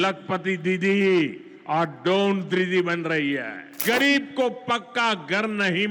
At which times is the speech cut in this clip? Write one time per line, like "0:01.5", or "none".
0:03.8